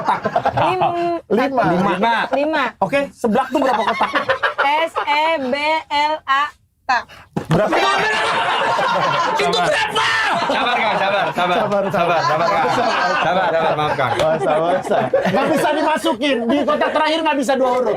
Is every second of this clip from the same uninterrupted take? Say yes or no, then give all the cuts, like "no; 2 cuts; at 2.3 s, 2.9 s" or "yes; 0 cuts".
yes; 0 cuts